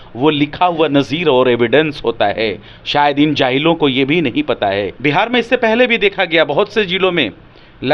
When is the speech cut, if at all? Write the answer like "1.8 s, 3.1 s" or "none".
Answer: 4.9 s